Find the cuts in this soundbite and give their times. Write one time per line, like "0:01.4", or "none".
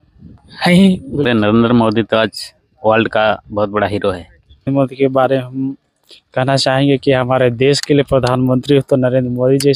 0:01.2
0:04.7

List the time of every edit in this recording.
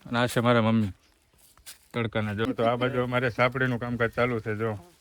0:02.5

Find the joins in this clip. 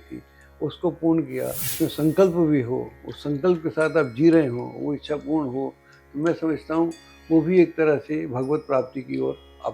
0:01.7

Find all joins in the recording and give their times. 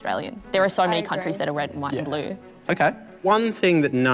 0:02.5

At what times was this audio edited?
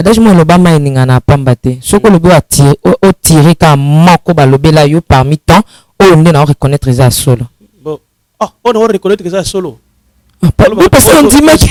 none

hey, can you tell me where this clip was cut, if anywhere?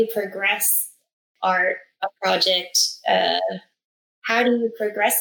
0:01.3

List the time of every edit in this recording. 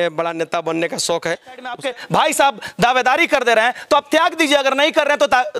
0:01.8

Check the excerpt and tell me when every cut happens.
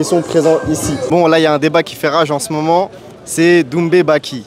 0:01.0

